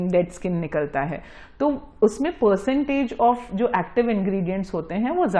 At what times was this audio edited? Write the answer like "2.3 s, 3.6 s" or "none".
none